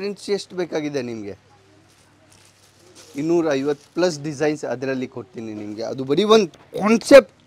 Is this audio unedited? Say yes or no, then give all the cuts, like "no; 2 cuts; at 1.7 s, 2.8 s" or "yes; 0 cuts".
yes; 0 cuts